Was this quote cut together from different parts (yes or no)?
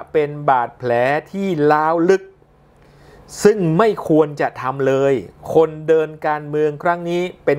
no